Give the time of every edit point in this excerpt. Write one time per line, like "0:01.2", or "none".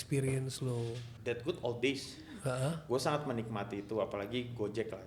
0:01.1